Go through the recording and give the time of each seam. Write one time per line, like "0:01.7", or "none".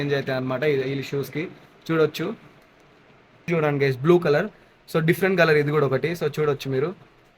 0:03.5